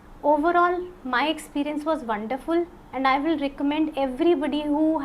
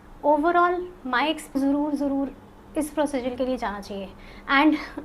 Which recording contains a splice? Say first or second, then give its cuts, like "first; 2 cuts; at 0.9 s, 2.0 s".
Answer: second; 1 cut; at 1.5 s